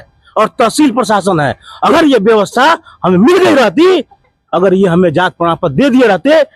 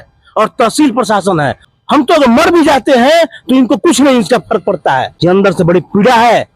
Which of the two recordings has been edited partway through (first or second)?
second